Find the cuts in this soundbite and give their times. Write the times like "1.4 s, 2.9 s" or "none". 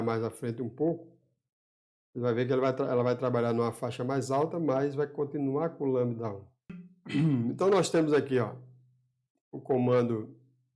6.9 s